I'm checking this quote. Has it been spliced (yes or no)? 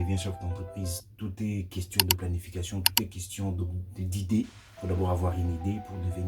no